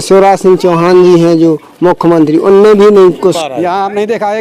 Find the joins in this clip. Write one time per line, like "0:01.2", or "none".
0:03.4